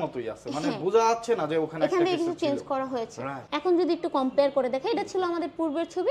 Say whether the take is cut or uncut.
uncut